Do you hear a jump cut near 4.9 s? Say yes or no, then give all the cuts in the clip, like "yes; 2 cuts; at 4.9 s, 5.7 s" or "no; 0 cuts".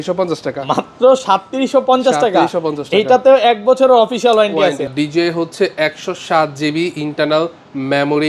yes; 1 cut; at 4.9 s